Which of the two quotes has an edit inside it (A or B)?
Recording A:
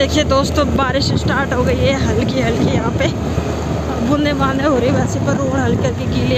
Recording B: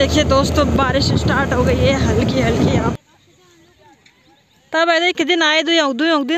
B